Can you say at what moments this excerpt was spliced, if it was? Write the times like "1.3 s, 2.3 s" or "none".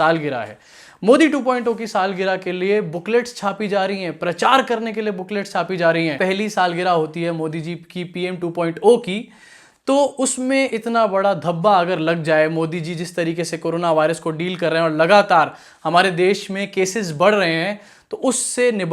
6.1 s